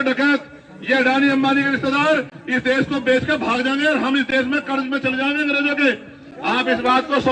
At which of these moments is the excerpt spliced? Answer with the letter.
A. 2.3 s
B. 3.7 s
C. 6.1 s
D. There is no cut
D